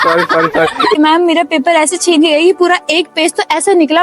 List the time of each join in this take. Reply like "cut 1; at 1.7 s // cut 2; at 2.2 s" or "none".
cut 1; at 0.9 s